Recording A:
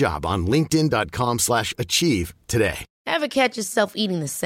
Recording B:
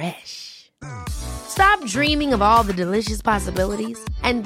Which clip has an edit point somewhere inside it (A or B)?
A